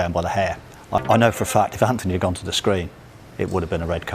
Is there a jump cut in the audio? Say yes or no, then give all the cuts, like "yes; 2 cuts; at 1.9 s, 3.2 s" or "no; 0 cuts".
yes; 1 cut; at 1.0 s